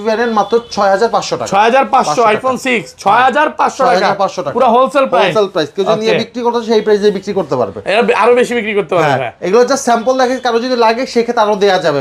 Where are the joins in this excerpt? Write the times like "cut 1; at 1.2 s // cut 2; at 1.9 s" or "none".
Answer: none